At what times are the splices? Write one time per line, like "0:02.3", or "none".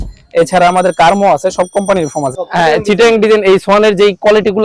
0:02.3